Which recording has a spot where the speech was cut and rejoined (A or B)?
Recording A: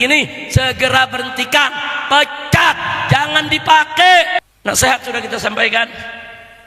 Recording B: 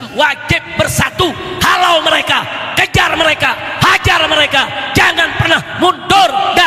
A